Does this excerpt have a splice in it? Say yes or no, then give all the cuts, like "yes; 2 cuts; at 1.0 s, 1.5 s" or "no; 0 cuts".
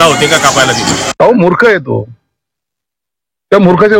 yes; 1 cut; at 1.2 s